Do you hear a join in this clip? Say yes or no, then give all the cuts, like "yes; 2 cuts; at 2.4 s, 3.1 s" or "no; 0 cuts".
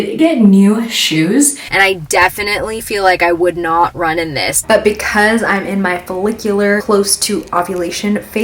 yes; 3 cuts; at 1.6 s, 4.6 s, 6.8 s